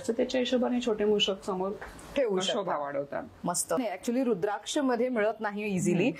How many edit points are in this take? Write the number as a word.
one